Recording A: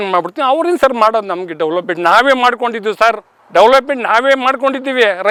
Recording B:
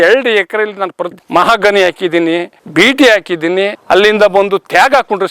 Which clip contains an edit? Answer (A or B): B